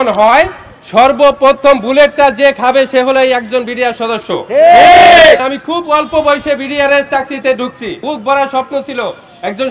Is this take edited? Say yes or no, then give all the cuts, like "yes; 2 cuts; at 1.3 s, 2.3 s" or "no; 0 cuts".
yes; 2 cuts; at 5.4 s, 8.0 s